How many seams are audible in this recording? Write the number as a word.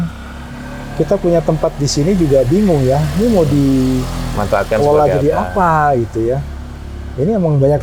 zero